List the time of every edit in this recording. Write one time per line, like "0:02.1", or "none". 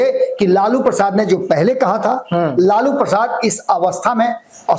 none